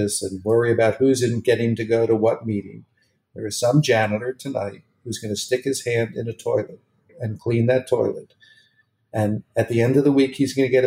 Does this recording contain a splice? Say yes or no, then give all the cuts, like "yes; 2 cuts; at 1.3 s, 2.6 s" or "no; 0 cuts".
yes; 1 cut; at 7.2 s